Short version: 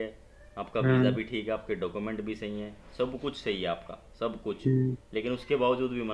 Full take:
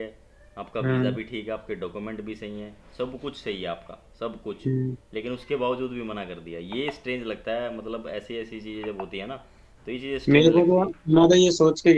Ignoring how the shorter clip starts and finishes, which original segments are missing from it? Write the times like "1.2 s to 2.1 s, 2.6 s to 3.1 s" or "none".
none